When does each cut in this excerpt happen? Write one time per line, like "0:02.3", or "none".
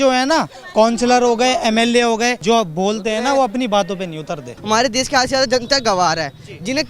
0:02.4
0:04.5